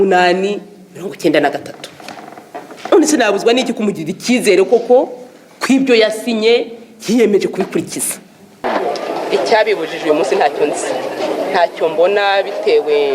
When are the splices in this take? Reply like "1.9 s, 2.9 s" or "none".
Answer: 8.5 s